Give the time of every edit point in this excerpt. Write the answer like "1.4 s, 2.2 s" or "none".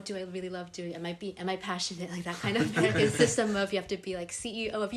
2.9 s